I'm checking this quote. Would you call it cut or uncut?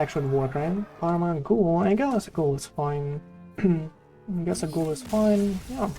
cut